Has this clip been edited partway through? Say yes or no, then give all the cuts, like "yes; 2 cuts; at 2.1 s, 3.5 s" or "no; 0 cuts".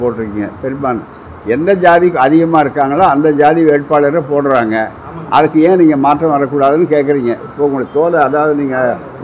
no; 0 cuts